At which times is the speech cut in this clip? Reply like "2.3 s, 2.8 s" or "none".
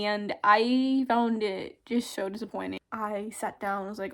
2.8 s